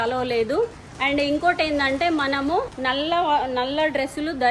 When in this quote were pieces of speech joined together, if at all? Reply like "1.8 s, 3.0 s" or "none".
2.7 s